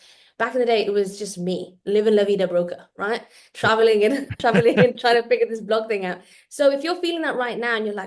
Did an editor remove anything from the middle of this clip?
yes; 1 cut; at 4.3 s

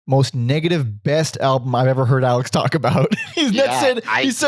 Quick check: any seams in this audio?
yes; 1 cut; at 3.3 s

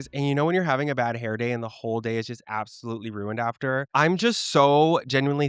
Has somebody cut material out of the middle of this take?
no; 0 cuts

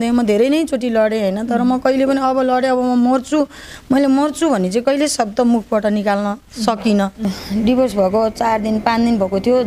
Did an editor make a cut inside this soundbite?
yes; 1 cut; at 7.2 s

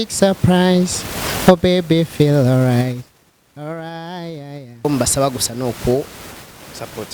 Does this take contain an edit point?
yes; 1 cut; at 4.8 s

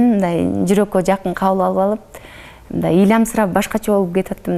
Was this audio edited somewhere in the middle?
no; 0 cuts

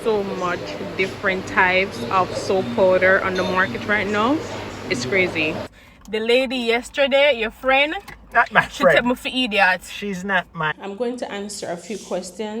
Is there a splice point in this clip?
yes; 2 cuts; at 5.8 s, 10.8 s

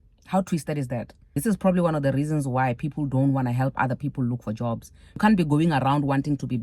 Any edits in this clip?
yes; 2 cuts; at 1.2 s, 5.2 s

